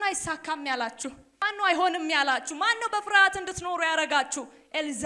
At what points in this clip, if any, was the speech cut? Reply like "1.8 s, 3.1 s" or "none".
1.4 s